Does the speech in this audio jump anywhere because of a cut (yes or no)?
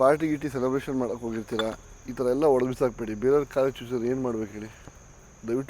no